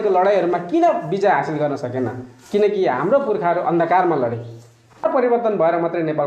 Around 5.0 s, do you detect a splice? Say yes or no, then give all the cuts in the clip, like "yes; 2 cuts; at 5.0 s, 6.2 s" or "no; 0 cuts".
yes; 1 cut; at 5.0 s